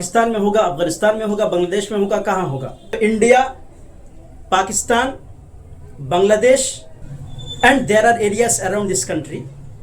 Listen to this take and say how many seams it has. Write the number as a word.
one